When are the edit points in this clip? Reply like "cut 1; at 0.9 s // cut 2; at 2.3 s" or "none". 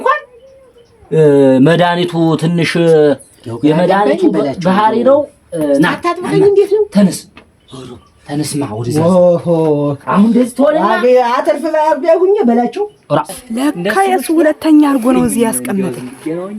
cut 1; at 13.3 s